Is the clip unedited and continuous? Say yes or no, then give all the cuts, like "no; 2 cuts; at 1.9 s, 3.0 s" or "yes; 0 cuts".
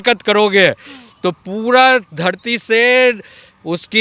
yes; 0 cuts